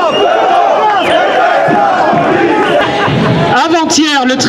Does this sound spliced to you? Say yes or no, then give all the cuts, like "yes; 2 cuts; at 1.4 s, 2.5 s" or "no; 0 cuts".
yes; 1 cut; at 2.8 s